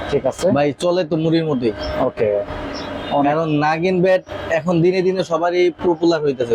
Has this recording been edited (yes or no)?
no